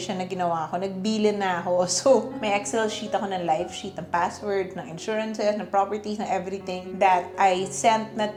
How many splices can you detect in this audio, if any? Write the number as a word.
zero